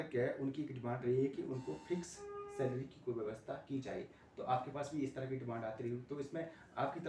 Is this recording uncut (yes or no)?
yes